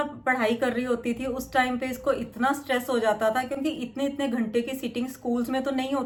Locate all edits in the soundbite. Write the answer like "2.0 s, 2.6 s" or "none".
none